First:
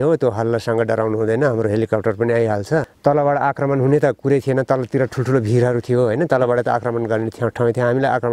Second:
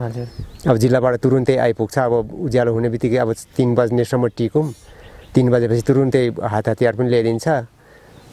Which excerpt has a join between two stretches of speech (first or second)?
first